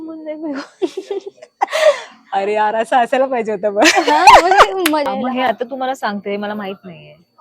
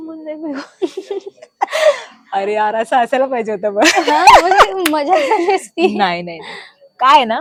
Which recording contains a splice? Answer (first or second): first